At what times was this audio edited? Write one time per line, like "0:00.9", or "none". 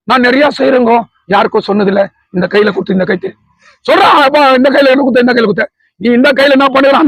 none